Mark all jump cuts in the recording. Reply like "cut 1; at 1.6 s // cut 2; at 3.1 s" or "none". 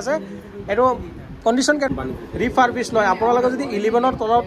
cut 1; at 1.9 s